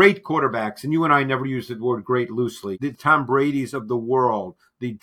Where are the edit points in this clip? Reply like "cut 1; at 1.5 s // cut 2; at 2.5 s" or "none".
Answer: cut 1; at 2.8 s